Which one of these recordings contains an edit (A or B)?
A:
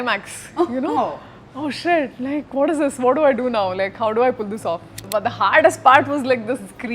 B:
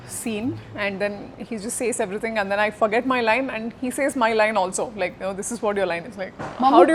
A